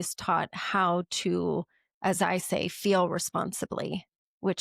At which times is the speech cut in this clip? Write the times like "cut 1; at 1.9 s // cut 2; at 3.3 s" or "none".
none